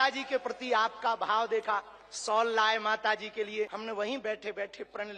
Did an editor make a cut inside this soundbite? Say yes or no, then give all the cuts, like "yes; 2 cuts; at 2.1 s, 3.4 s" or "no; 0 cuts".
yes; 1 cut; at 3.8 s